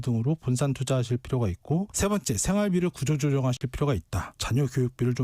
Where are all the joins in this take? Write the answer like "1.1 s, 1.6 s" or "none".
1.9 s